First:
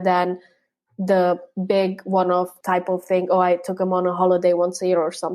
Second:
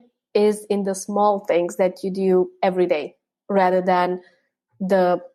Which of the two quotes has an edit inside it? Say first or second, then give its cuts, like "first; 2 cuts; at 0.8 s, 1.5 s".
first; 1 cut; at 2.6 s